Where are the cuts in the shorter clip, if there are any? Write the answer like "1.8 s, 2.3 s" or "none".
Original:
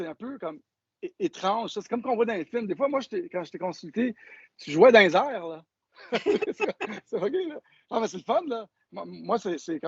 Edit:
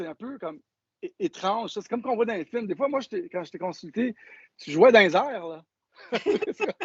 none

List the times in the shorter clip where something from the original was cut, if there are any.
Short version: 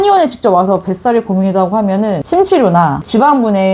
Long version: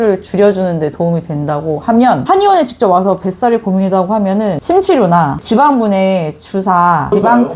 none

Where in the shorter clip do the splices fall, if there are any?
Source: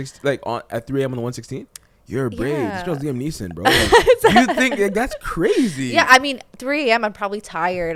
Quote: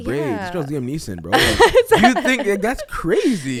none

